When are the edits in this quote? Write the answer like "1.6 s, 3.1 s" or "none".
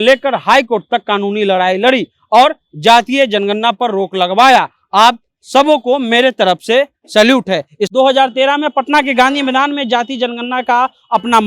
7.9 s